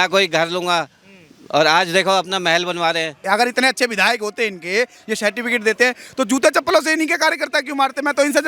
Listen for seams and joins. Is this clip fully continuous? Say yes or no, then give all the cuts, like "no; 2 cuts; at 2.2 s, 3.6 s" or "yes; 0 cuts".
no; 1 cut; at 3.1 s